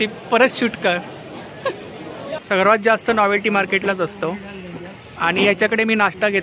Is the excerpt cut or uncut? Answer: cut